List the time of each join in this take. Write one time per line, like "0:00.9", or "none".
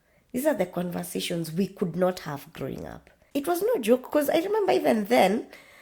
0:03.1